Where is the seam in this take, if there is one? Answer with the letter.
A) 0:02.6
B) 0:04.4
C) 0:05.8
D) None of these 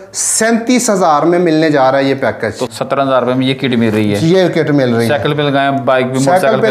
A